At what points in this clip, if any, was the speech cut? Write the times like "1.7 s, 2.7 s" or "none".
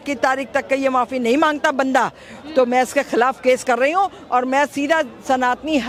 none